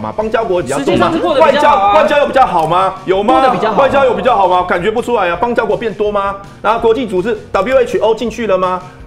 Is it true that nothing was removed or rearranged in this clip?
yes; 0 cuts

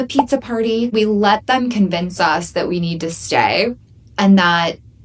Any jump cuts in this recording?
yes; 1 cut; at 0.9 s

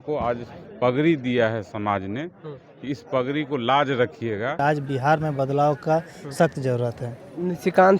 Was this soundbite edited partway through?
yes; 1 cut; at 4.6 s

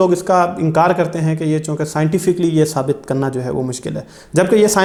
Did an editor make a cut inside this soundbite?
no; 0 cuts

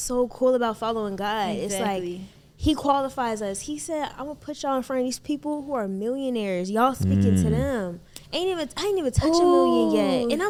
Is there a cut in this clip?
no; 0 cuts

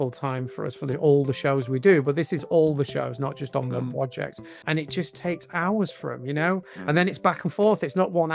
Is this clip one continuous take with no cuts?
no; 1 cut; at 4.6 s

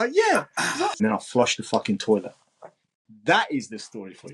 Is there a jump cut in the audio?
yes; 1 cut; at 1.0 s

